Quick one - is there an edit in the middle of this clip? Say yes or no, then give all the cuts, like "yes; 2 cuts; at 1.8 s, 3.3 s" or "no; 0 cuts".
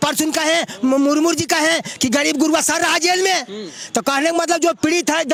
no; 0 cuts